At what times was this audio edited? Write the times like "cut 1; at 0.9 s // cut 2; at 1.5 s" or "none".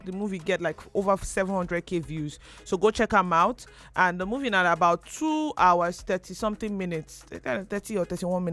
none